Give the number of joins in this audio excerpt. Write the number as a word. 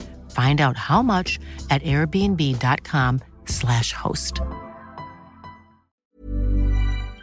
one